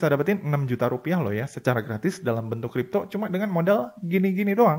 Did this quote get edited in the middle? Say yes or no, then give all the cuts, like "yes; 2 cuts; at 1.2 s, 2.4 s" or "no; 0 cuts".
no; 0 cuts